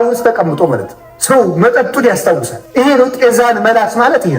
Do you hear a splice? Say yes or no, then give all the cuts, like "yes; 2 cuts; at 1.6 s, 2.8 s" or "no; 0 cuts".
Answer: yes; 2 cuts; at 1.0 s, 2.6 s